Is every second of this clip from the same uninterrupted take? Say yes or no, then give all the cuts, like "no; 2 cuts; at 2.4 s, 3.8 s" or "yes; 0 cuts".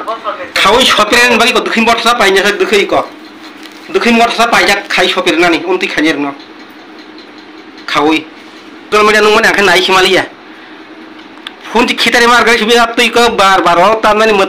no; 1 cut; at 8.9 s